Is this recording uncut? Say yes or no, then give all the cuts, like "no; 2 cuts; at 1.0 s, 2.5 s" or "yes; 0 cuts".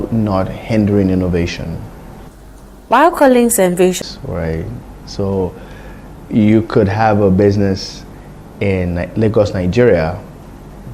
no; 1 cut; at 4.0 s